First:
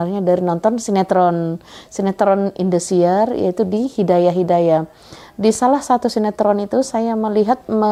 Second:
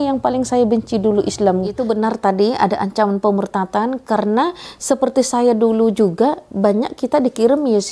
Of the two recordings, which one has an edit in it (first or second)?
second